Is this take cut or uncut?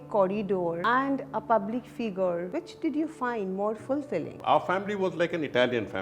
cut